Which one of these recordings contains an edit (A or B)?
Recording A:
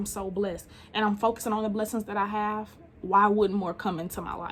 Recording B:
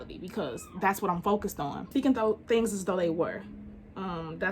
B